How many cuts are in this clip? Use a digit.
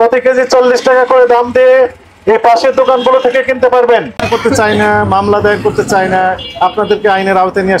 1